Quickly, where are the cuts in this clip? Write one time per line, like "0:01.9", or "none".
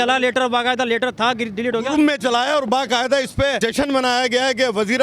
0:03.6